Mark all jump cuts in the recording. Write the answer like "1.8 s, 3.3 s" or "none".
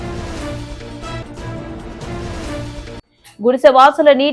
2.4 s